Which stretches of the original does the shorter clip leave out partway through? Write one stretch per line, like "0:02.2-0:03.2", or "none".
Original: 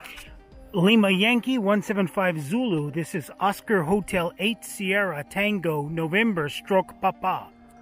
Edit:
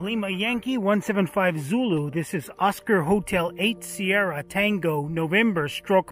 none